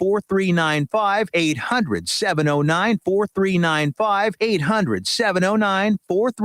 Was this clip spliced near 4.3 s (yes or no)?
yes